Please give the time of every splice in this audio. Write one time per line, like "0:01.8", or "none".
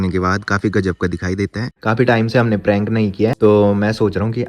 0:01.7
0:03.3